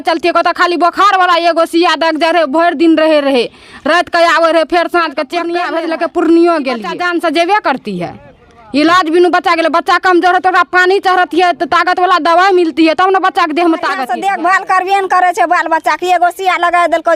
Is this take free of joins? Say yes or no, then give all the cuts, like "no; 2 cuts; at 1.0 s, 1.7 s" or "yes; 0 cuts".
no; 3 cuts; at 5.6 s, 7.0 s, 14.0 s